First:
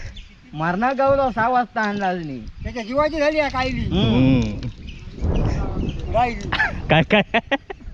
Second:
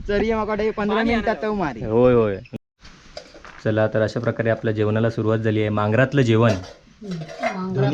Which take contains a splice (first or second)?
second